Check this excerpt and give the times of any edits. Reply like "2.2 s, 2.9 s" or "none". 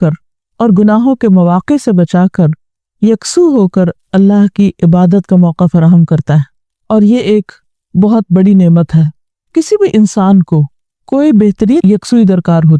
11.8 s